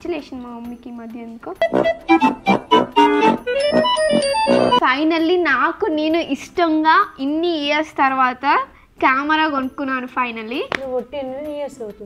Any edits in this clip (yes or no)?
no